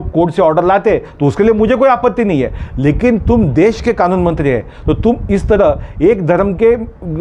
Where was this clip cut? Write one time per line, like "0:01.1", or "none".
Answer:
none